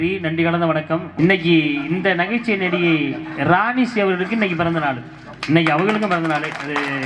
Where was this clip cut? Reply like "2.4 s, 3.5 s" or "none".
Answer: 1.1 s